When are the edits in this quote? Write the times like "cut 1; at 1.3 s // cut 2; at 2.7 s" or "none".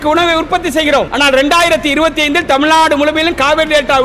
cut 1; at 1.1 s